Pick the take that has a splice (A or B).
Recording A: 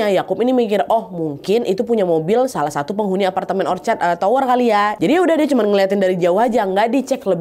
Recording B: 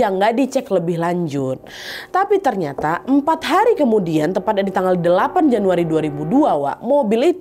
A